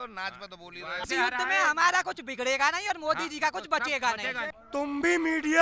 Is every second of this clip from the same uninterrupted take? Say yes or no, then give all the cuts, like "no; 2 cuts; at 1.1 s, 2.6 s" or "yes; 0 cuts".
no; 2 cuts; at 1.1 s, 4.5 s